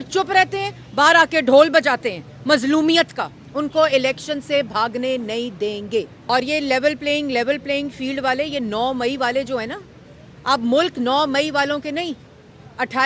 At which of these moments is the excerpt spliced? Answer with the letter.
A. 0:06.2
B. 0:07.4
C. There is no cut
A